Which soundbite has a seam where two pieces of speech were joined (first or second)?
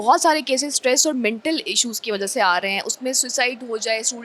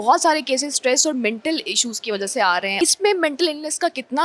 second